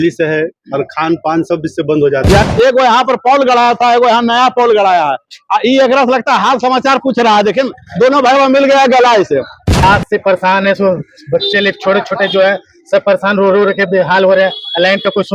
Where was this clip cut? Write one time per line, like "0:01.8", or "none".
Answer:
0:02.4
0:09.6